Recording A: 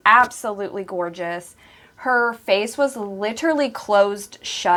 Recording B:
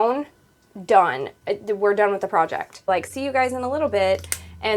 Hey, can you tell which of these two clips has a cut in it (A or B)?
B